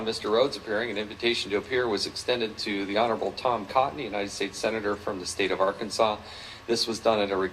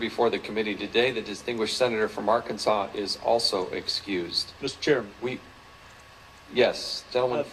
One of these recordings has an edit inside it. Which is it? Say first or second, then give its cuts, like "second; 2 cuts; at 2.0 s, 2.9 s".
first; 1 cut; at 1.1 s